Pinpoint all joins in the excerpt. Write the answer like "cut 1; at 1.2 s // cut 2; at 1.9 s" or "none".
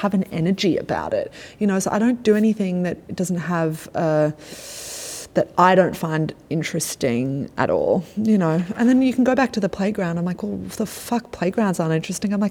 none